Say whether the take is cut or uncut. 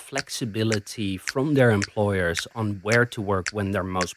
uncut